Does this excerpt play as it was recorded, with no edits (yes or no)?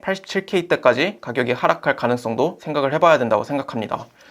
yes